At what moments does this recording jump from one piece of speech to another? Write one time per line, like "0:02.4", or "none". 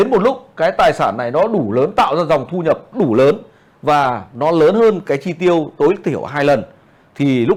none